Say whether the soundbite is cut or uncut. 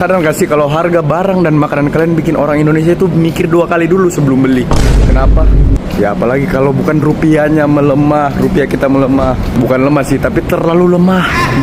uncut